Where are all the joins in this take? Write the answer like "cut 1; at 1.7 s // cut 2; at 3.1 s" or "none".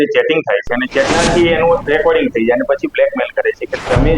cut 1; at 1.1 s